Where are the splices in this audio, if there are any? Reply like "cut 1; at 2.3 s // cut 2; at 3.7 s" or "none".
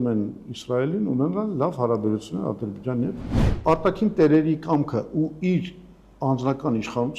cut 1; at 3.5 s